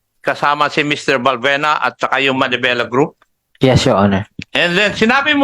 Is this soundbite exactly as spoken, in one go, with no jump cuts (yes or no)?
no